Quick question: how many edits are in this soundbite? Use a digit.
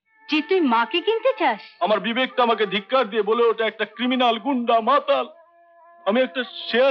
1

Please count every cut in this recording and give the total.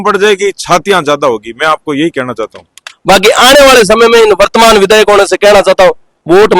1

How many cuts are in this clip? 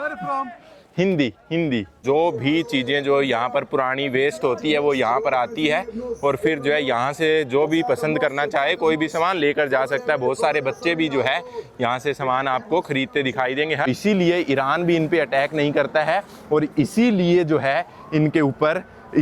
2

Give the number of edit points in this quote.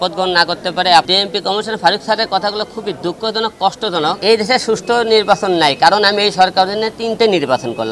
2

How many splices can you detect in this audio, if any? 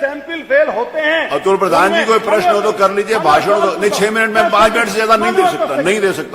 0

